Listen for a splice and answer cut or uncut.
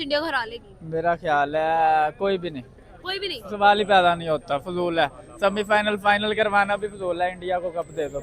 uncut